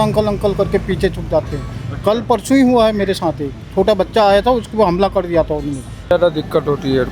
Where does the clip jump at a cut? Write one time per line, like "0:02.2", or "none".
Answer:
0:06.1